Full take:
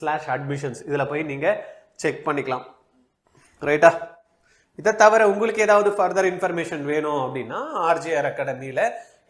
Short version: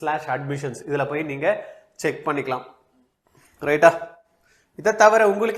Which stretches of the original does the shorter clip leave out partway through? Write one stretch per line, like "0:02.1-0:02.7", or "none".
none